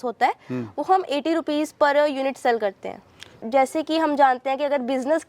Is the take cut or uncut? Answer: cut